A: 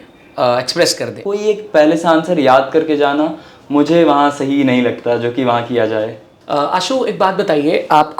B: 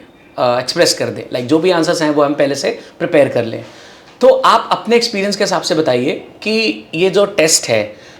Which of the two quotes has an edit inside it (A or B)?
A